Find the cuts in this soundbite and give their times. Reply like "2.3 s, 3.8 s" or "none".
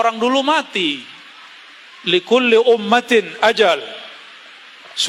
none